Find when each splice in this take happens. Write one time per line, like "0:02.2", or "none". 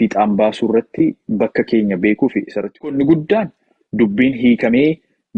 0:02.9